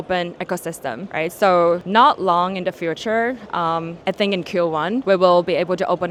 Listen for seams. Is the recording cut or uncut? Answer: uncut